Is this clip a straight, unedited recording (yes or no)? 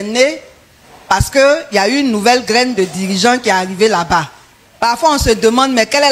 no